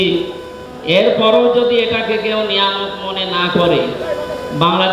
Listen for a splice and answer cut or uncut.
cut